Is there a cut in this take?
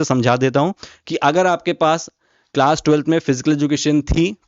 no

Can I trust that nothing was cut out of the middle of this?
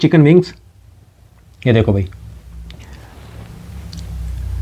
yes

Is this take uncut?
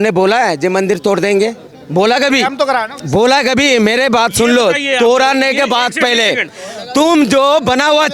yes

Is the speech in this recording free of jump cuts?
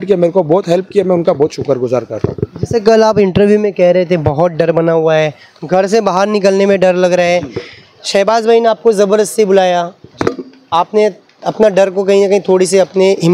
yes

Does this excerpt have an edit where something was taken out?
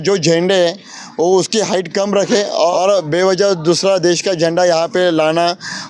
yes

